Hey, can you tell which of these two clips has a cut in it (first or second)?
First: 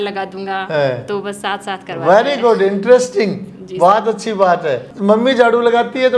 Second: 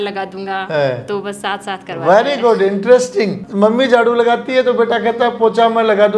second